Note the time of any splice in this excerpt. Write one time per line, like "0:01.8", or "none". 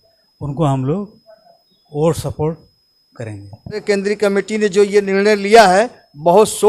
0:03.8